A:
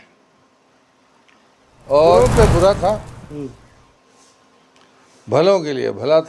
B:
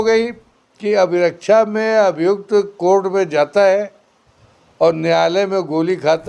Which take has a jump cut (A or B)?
A